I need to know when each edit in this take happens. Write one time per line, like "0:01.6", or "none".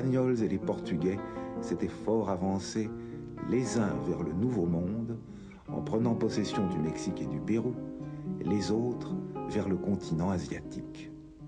none